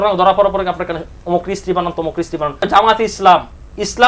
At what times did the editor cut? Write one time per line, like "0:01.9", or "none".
0:02.7